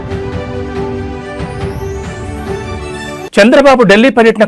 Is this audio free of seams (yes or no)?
no